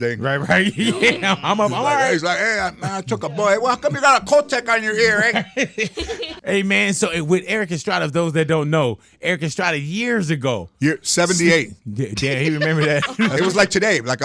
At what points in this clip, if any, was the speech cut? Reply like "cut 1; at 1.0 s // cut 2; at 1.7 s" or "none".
cut 1; at 6.3 s // cut 2; at 13.3 s

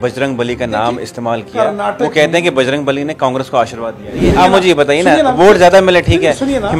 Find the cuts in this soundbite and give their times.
cut 1; at 4.3 s

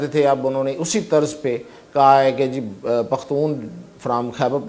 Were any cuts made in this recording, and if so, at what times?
none

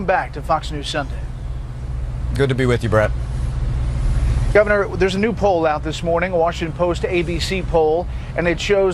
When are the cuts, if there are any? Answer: cut 1; at 7.0 s

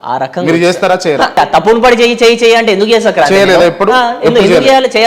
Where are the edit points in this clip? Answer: cut 1; at 1.4 s

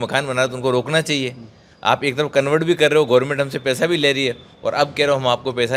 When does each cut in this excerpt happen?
none

